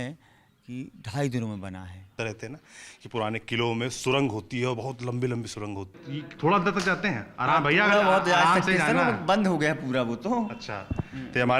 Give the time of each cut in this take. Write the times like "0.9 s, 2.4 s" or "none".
2.1 s, 5.9 s